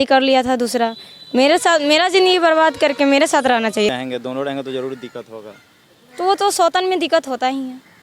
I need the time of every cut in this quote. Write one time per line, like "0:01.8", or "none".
0:03.9